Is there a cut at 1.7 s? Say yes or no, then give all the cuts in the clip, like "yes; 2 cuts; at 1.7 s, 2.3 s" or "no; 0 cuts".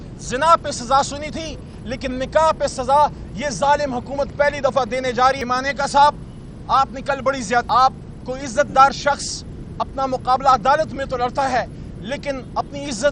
no; 2 cuts; at 5.4 s, 7.7 s